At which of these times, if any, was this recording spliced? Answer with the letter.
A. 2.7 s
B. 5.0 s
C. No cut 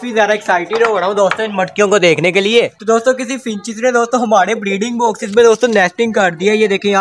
A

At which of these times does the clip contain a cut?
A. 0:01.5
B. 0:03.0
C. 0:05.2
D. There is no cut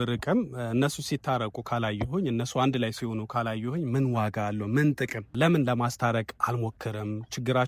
C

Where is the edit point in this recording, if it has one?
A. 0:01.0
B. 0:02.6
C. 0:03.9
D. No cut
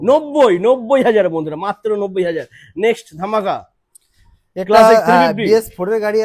D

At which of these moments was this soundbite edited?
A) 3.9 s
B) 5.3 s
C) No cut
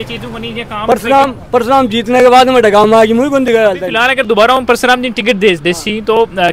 A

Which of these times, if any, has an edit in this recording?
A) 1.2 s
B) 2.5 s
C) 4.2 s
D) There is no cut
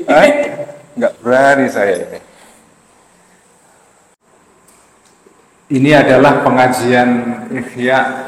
C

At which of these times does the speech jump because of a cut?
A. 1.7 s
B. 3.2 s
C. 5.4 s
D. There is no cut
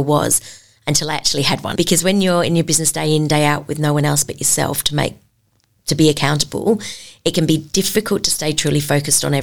D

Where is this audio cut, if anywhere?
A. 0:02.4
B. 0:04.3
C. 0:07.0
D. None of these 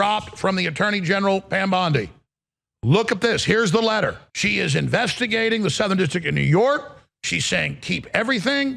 B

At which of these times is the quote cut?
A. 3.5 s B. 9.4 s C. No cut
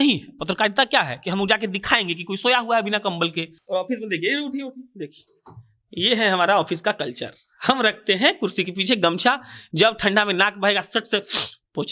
A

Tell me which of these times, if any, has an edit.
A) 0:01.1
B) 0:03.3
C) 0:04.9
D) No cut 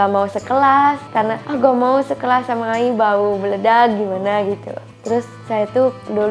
C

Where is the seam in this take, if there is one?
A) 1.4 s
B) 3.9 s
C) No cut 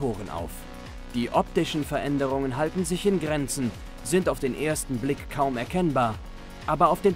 C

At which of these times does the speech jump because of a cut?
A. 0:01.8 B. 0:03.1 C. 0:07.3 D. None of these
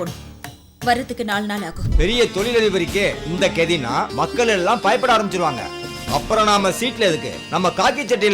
A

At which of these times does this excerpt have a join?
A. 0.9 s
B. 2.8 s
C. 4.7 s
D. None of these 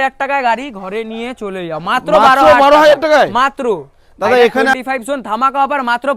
C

